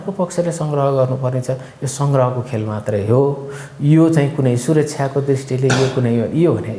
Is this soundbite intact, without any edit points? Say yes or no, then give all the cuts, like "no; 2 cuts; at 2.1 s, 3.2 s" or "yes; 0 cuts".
yes; 0 cuts